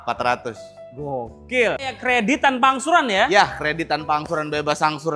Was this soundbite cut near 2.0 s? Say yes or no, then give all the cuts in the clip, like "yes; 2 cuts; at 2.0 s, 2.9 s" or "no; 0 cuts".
yes; 1 cut; at 2.0 s